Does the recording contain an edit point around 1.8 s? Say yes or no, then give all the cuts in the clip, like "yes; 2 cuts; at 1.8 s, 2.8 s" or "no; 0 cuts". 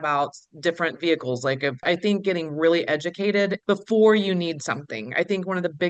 yes; 2 cuts; at 1.8 s, 3.6 s